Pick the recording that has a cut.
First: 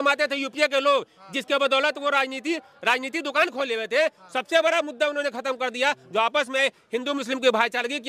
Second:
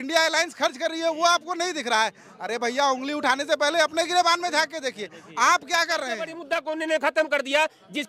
second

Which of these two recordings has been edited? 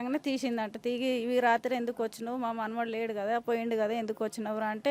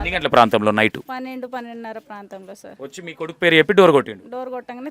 second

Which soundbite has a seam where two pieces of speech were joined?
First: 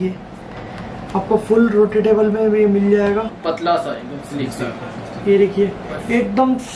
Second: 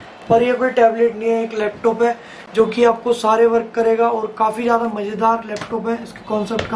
first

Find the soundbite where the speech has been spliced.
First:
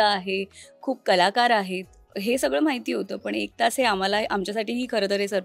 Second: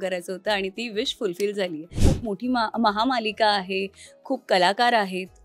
second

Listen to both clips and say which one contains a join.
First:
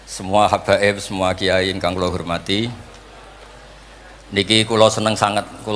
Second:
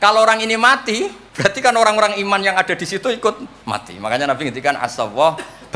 second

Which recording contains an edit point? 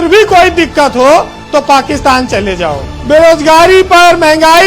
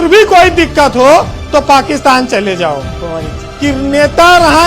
first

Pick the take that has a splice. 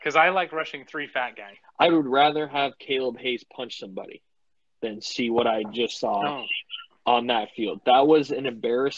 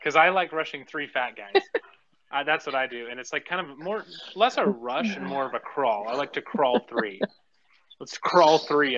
first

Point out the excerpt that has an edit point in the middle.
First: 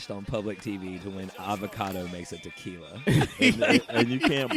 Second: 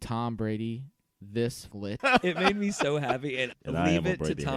second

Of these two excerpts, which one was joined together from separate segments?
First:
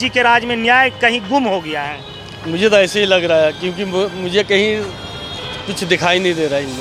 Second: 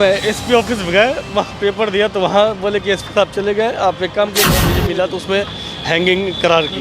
second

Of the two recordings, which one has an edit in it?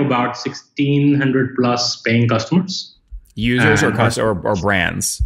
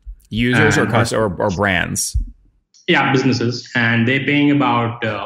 second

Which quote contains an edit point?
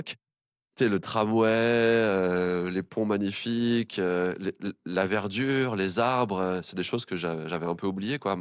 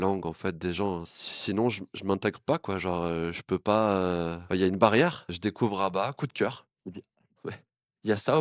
second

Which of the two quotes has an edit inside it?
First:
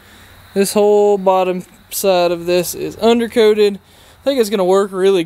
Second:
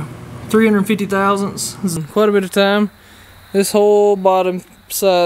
second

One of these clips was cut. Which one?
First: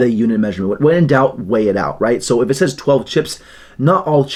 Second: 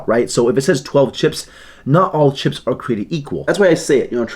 second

